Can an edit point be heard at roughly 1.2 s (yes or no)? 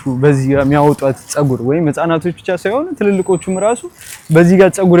no